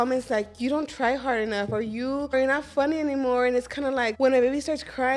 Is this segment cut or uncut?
cut